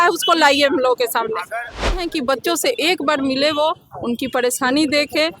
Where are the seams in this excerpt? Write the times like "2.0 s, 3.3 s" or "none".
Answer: 2.0 s